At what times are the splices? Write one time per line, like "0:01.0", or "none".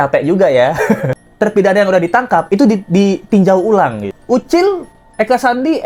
0:01.2
0:04.1